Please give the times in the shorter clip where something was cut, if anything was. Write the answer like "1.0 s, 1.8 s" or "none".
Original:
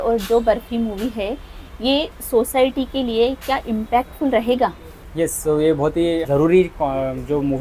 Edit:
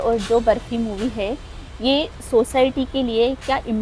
none